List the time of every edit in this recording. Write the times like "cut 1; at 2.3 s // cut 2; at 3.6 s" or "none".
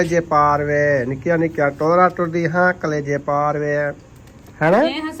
none